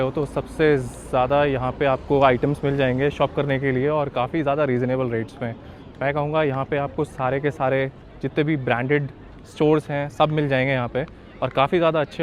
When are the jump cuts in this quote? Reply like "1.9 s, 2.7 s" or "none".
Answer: none